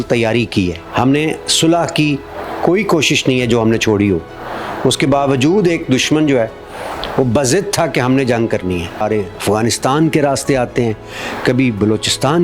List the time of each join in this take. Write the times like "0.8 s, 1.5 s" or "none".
0.8 s, 9.0 s